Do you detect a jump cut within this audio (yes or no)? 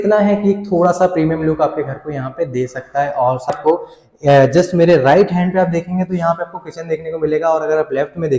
yes